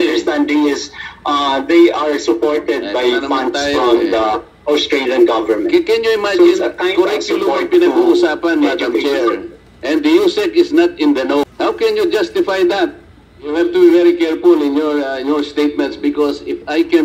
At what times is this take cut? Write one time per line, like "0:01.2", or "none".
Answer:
0:11.4
0:13.5